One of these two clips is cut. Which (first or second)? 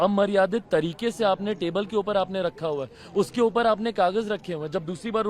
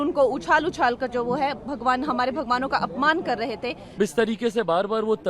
second